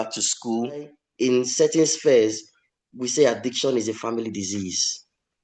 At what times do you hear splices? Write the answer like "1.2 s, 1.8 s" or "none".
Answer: 1.0 s